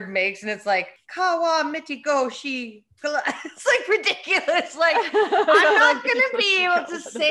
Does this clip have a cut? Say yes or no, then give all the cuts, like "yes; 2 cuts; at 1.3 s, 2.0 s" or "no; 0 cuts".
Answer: yes; 1 cut; at 1.0 s